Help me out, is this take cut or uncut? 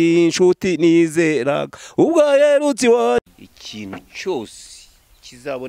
cut